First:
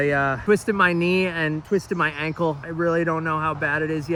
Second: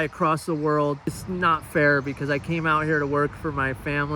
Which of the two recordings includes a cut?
second; 1 cut; at 1.2 s

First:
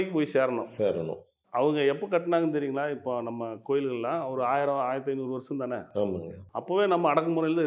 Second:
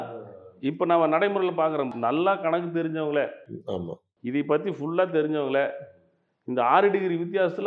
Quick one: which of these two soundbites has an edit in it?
second; 1 cut; at 1.9 s

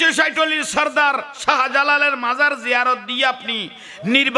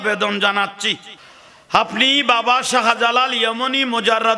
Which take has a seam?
second; 1 cut; at 1.0 s

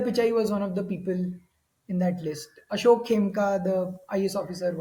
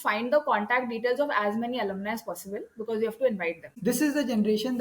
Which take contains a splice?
second; 1 cut; at 3.8 s

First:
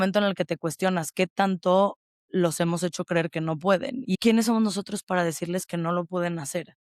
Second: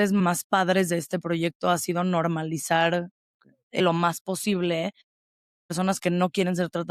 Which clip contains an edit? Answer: first; 1 cut; at 4.2 s

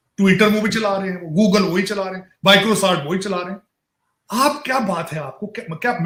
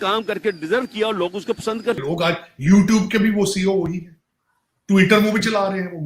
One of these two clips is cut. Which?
second; 1 cut; at 2.0 s

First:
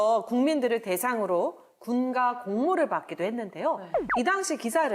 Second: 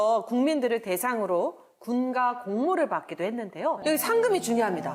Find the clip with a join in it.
second; 1 cut; at 3.8 s

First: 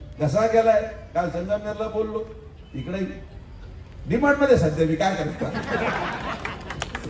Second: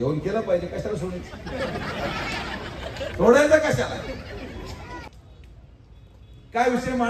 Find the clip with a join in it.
second; 1 cut; at 4.9 s

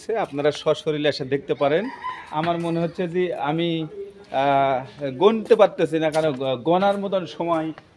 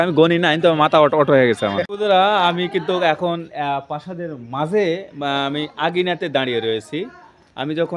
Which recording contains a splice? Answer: second; 1 cut; at 1.9 s

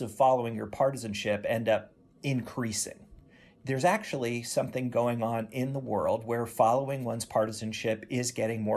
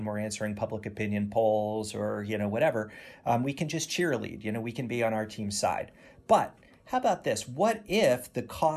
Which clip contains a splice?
first; 1 cut; at 3.5 s

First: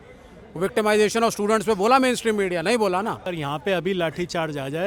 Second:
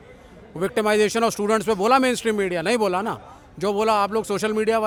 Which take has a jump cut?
first; 1 cut; at 3.3 s

